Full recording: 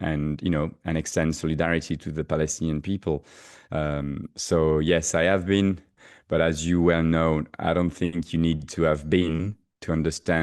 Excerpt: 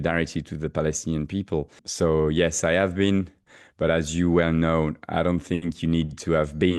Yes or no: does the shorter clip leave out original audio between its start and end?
yes